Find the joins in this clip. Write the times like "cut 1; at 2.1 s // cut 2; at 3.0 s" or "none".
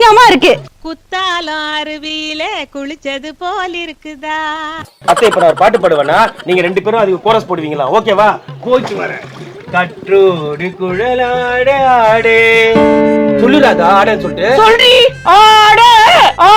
none